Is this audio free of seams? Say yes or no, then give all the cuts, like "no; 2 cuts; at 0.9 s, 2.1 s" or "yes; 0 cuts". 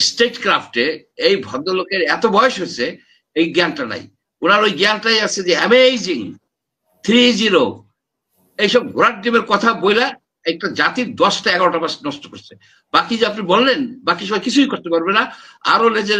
yes; 0 cuts